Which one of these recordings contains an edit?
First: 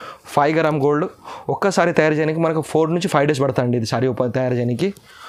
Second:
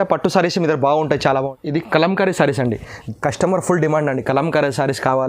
second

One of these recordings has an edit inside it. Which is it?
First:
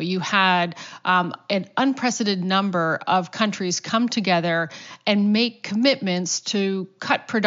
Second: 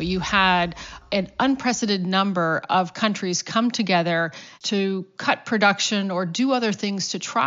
second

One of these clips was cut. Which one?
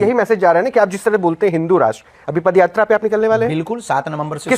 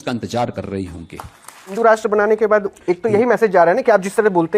second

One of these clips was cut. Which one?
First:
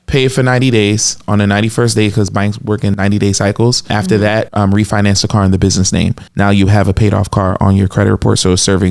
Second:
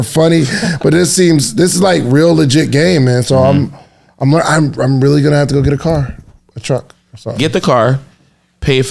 first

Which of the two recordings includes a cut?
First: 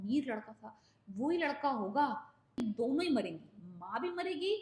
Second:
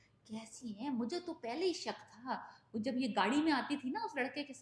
first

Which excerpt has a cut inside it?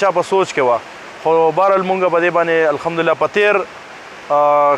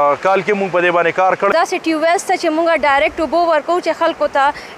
second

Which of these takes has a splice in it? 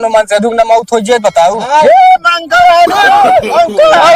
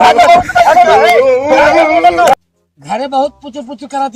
second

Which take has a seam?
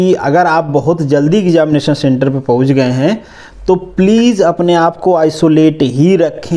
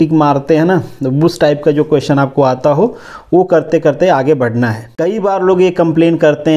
second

